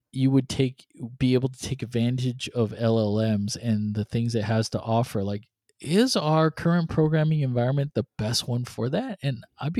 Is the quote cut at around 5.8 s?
no; 0 cuts

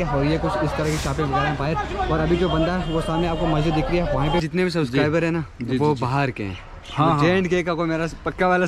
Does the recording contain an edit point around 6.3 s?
no; 1 cut; at 4.4 s

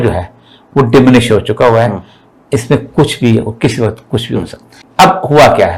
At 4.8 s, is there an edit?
yes; 1 cut; at 4.8 s

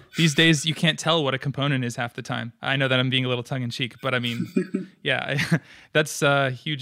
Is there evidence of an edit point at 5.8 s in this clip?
no; 1 cut; at 2.5 s

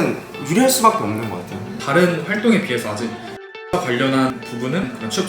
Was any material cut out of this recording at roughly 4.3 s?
yes; 2 cuts; at 1.8 s, 4.3 s

